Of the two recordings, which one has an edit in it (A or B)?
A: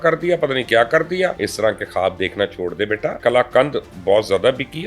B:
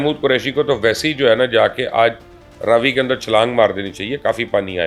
A